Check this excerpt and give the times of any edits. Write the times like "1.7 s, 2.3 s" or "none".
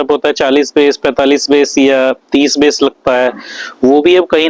none